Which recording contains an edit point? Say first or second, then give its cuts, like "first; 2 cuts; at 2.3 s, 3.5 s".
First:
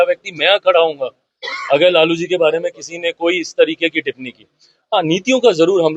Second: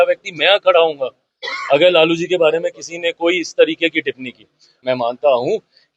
second; 1 cut; at 4.7 s